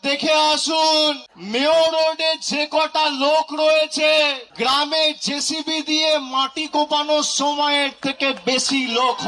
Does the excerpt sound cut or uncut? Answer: cut